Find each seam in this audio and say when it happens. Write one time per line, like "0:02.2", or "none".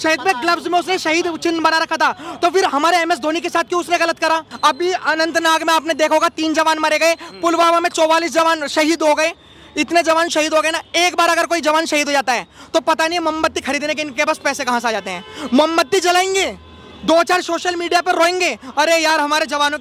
0:04.5